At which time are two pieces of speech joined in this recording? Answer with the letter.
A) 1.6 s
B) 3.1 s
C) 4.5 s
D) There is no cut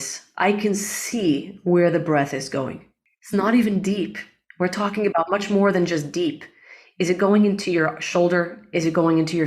B